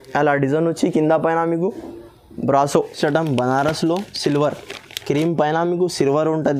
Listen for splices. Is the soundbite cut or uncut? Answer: cut